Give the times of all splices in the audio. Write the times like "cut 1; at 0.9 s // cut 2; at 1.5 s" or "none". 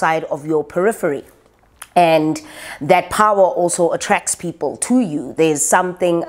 none